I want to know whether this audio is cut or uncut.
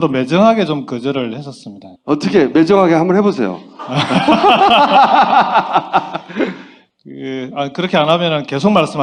uncut